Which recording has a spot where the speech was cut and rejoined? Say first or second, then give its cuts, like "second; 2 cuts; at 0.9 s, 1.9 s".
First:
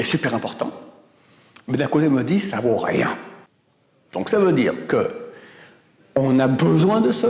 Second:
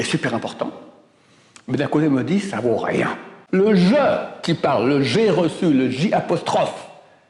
second; 1 cut; at 3.4 s